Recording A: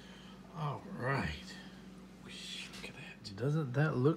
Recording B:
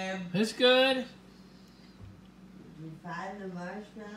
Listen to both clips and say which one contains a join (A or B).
A